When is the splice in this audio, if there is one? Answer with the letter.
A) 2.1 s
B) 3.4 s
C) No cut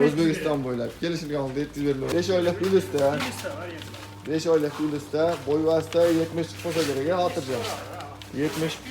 A